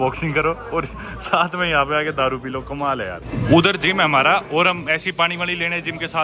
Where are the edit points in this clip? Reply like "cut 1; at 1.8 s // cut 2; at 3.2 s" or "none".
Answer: none